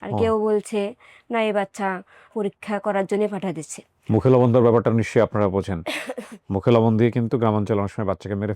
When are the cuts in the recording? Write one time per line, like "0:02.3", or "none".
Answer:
none